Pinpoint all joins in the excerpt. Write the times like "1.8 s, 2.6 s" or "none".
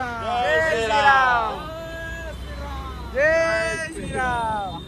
none